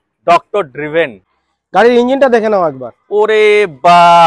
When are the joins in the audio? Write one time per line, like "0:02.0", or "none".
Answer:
0:01.4